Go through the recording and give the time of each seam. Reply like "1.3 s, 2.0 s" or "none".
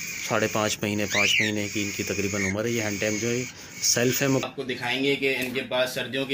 4.4 s